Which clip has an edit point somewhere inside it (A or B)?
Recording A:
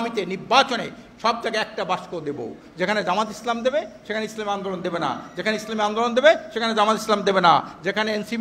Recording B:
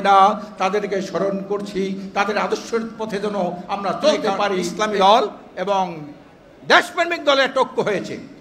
B